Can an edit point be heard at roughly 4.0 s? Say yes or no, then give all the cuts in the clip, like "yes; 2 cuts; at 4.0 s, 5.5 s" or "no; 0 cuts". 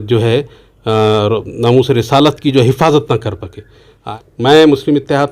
yes; 1 cut; at 4.0 s